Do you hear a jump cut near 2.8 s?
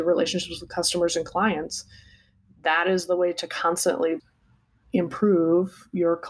no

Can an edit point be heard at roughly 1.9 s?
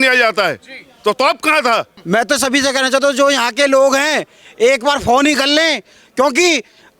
yes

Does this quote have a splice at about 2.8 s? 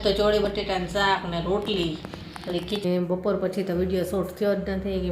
yes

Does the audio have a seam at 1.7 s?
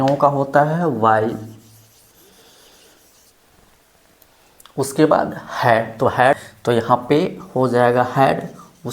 no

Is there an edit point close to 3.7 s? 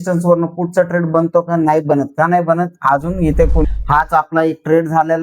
yes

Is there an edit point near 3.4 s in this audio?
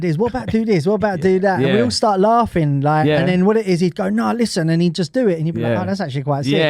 no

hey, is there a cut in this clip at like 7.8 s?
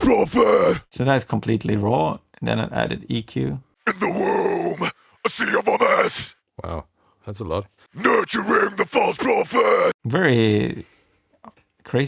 yes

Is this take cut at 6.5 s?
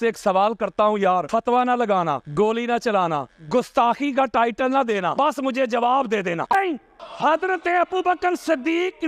yes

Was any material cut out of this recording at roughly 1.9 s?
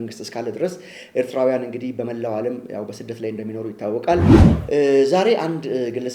no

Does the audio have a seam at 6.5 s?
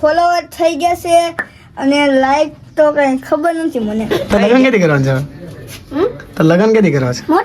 no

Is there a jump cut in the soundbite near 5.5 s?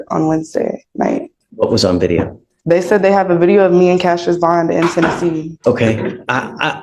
yes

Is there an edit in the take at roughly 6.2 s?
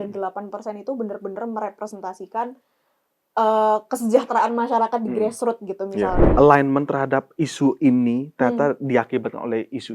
yes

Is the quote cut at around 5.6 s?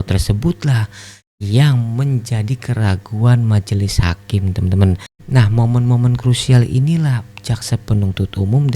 yes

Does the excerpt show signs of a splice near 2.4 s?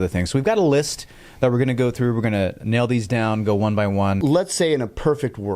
no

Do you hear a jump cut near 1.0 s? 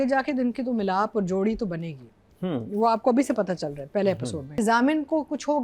no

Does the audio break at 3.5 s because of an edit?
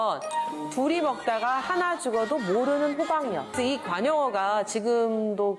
yes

